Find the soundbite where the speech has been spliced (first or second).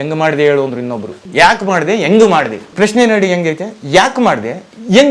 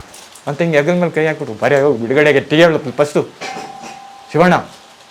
first